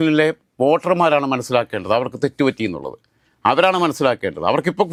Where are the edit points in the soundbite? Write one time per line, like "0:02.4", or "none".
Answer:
none